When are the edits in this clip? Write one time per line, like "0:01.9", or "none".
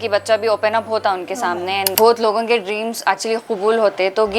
0:01.9